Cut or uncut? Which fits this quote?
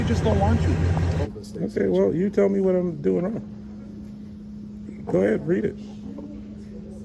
cut